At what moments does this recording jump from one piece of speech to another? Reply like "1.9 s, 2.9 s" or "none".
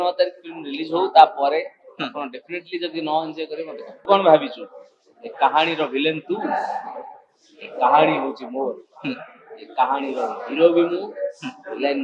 4.1 s